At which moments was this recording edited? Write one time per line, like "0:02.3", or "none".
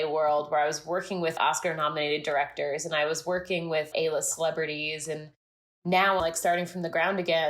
0:01.3
0:03.9
0:06.2